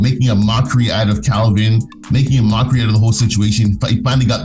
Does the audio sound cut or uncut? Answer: uncut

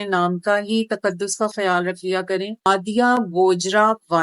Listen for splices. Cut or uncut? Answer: cut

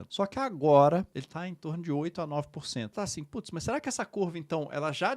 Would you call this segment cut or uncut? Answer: cut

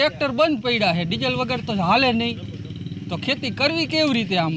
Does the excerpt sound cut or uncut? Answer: uncut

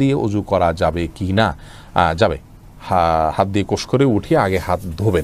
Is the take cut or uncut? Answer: uncut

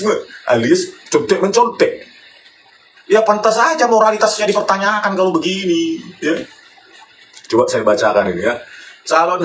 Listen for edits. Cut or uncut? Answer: uncut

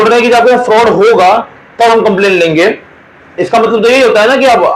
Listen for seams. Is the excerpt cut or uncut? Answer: uncut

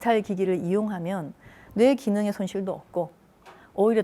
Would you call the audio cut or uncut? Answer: uncut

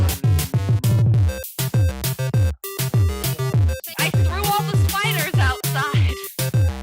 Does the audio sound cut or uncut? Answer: cut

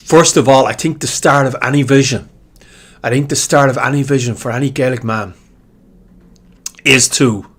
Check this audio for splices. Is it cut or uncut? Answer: uncut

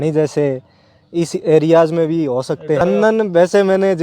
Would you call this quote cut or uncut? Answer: cut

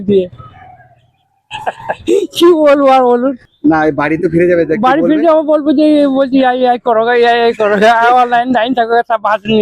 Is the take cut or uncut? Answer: cut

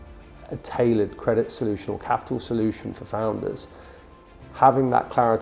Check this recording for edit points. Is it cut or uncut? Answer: uncut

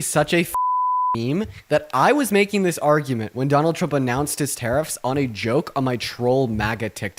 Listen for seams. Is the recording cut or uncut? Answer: uncut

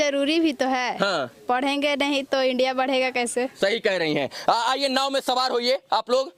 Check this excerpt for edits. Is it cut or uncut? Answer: uncut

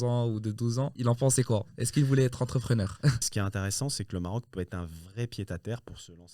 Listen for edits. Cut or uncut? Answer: cut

